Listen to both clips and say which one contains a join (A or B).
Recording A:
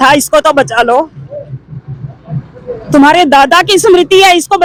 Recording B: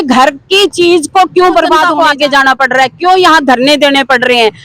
B